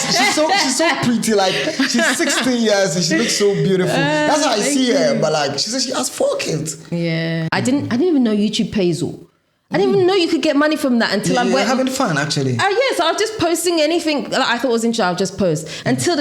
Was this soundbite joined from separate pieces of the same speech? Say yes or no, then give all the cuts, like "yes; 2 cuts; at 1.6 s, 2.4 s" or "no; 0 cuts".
yes; 1 cut; at 7.5 s